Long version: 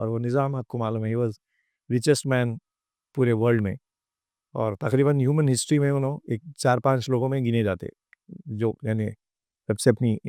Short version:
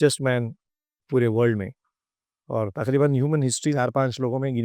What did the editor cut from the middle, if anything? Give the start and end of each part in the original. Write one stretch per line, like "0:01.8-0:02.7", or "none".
0:05.8-0:06.6